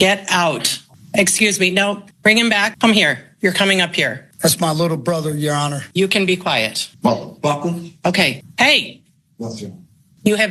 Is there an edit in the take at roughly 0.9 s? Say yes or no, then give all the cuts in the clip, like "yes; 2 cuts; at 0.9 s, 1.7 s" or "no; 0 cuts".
no; 0 cuts